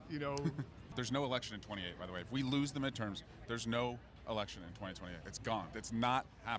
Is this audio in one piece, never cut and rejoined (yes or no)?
no